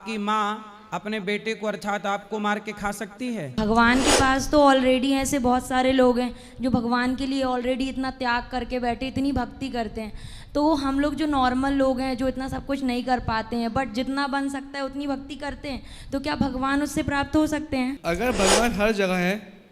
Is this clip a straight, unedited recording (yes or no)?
no